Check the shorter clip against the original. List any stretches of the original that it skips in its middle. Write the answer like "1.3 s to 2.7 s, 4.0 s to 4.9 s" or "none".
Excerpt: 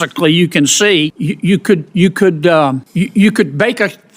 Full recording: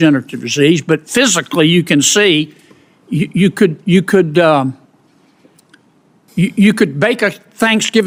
2.6 s to 3.1 s, 4.8 s to 6.3 s